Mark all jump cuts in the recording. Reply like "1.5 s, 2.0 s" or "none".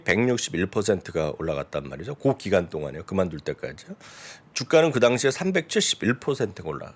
none